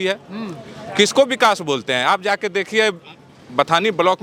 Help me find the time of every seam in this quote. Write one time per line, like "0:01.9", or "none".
none